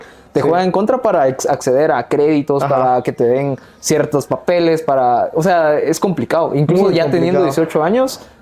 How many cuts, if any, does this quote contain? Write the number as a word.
zero